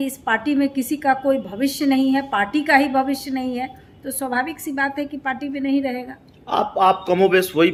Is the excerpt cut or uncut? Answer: uncut